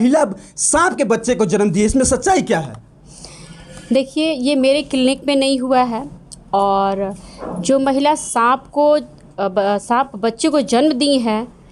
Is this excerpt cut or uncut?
uncut